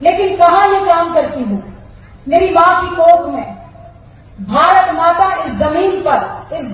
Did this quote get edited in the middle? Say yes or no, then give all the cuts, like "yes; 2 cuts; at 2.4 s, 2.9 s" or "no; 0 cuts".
no; 0 cuts